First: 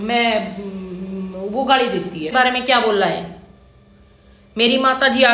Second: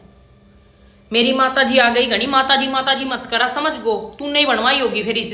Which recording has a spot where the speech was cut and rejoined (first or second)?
first